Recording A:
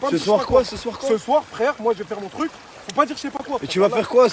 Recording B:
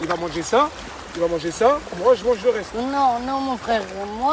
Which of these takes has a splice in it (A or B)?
A